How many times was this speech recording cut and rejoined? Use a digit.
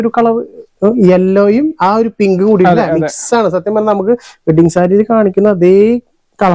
0